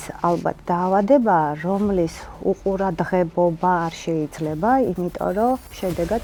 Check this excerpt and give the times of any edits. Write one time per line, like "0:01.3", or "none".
none